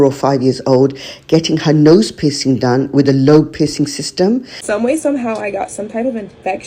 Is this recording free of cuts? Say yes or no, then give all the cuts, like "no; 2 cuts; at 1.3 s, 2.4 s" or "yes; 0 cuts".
no; 1 cut; at 4.6 s